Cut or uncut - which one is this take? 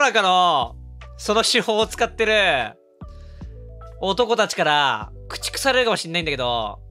uncut